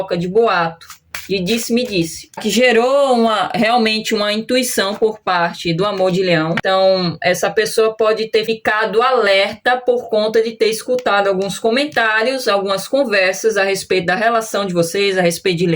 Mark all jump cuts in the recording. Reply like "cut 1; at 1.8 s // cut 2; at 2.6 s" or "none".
cut 1; at 2.4 s // cut 2; at 6.6 s // cut 3; at 8.5 s